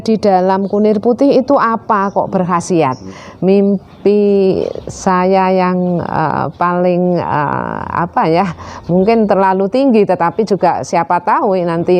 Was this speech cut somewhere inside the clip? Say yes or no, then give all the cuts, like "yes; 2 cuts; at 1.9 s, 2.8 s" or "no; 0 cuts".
yes; 1 cut; at 3.1 s